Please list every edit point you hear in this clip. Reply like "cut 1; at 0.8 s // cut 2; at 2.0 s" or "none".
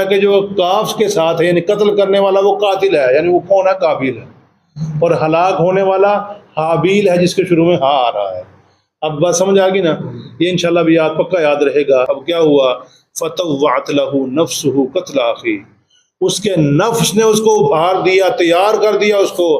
cut 1; at 12.1 s